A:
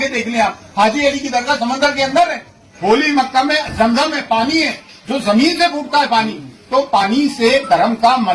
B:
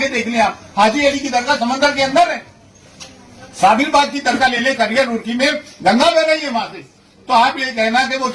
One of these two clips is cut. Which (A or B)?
A